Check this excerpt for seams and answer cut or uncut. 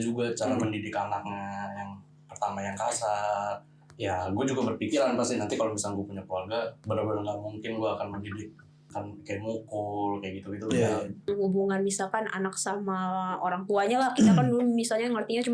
cut